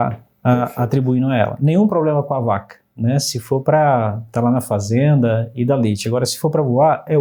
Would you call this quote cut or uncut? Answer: uncut